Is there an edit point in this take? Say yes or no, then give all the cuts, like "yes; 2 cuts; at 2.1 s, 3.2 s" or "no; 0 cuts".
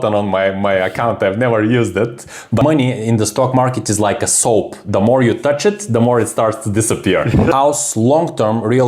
yes; 2 cuts; at 2.6 s, 7.5 s